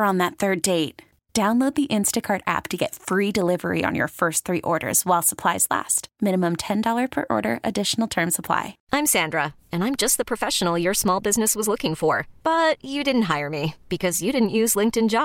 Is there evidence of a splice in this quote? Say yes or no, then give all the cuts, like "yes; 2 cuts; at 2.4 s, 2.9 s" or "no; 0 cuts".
yes; 1 cut; at 8.8 s